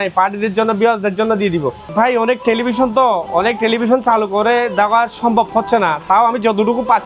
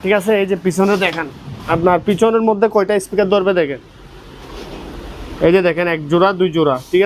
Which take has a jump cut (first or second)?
first